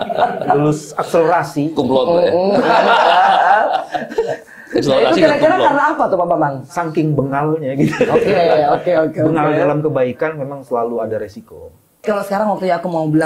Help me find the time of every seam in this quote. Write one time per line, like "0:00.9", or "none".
0:12.0

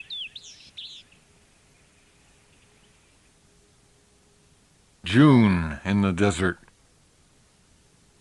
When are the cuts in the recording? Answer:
none

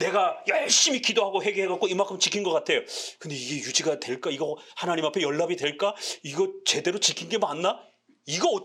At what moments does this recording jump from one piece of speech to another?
none

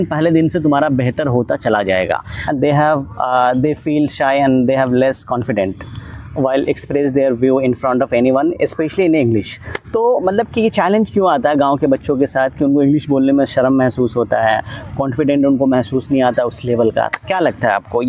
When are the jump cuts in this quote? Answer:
0:02.3

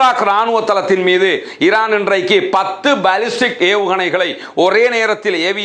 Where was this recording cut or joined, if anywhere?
none

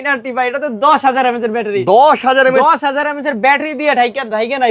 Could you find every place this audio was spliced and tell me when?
none

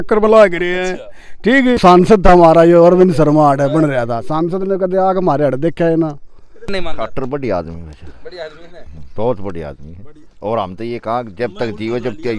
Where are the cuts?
0:01.8
0:06.7

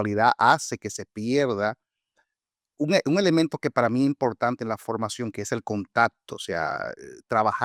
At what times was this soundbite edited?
none

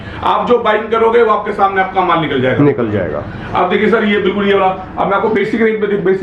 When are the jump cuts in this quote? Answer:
none

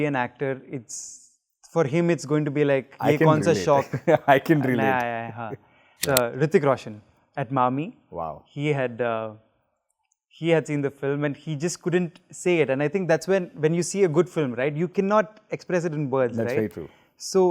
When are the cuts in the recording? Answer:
0:06.0

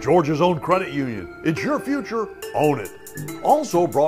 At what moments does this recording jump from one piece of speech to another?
none

